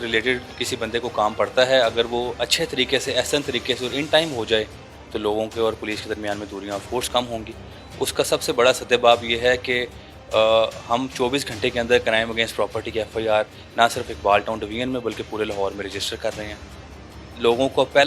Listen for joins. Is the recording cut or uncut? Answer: uncut